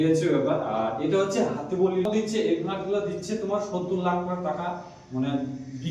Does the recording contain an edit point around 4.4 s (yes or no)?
no